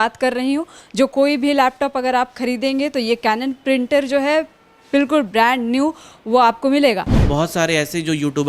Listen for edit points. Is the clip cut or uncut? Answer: cut